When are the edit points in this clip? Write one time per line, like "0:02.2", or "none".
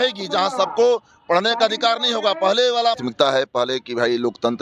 0:03.0